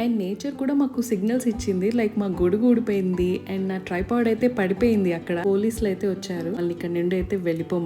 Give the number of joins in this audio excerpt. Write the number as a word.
two